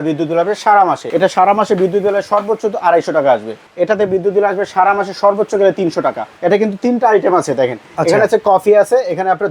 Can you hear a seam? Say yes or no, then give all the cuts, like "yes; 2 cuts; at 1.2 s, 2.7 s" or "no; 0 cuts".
yes; 3 cuts; at 1.0 s, 3.6 s, 6.3 s